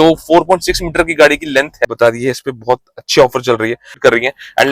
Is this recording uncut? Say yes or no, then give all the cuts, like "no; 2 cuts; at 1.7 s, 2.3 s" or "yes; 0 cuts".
no; 2 cuts; at 1.8 s, 4.0 s